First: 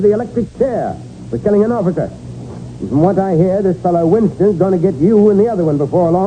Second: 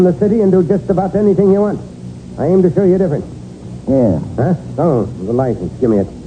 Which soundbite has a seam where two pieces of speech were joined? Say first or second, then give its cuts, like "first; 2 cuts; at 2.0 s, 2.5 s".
first; 1 cut; at 1.8 s